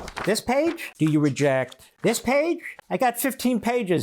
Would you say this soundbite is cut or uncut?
cut